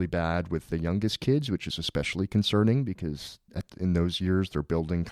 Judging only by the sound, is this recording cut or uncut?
uncut